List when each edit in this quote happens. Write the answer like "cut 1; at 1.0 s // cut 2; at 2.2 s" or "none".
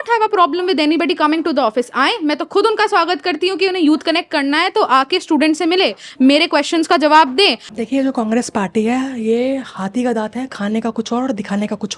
cut 1; at 7.7 s